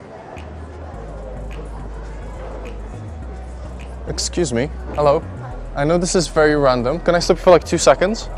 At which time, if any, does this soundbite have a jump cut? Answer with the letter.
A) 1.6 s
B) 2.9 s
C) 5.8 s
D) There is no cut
D